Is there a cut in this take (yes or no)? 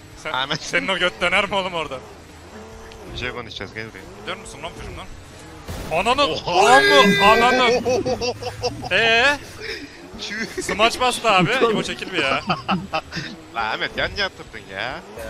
no